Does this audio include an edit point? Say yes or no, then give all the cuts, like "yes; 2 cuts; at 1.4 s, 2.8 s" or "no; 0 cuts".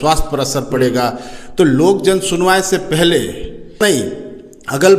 yes; 1 cut; at 3.8 s